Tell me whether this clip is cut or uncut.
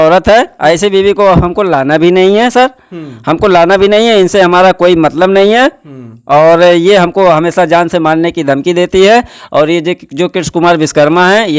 uncut